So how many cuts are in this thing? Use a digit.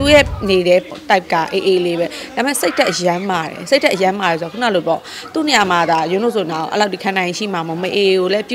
0